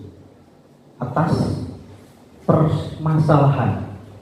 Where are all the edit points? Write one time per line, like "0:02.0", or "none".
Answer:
none